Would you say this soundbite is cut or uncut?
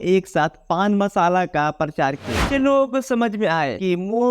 cut